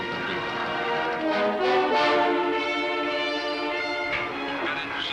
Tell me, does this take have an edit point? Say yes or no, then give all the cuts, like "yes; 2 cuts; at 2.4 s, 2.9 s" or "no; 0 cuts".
no; 0 cuts